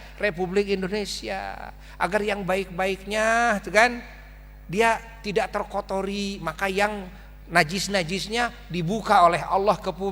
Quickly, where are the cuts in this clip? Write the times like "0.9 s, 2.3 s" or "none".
none